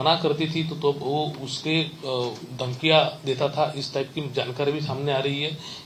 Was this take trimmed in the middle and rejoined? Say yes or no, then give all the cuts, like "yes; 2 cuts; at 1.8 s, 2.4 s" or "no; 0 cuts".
no; 0 cuts